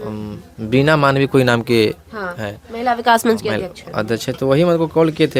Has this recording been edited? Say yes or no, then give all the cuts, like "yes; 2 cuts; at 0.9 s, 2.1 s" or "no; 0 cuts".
no; 0 cuts